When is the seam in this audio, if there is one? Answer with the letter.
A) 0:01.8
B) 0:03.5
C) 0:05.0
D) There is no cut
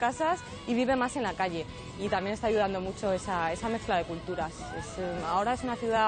D